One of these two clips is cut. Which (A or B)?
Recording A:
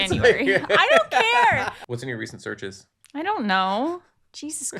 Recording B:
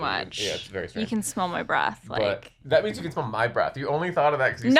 A